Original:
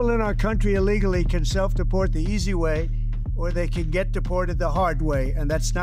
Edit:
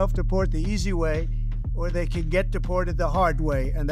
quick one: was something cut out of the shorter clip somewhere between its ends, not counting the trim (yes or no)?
no